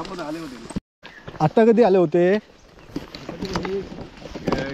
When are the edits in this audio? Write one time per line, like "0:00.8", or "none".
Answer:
0:00.9